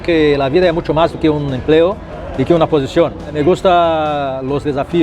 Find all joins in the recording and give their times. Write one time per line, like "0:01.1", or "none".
none